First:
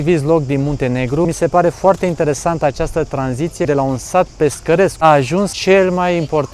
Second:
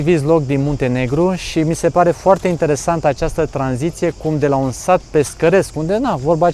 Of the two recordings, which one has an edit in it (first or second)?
first